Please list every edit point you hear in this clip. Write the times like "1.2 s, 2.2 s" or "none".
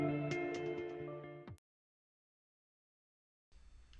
none